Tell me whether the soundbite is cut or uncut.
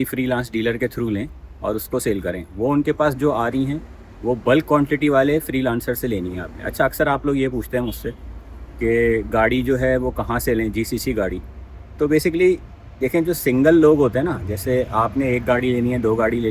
uncut